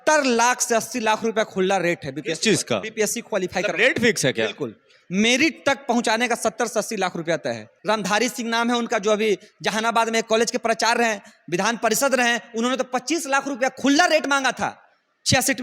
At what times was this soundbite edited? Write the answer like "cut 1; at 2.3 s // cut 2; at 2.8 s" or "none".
cut 1; at 7.7 s